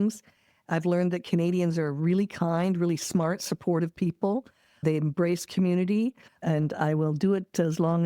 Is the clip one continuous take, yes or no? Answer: no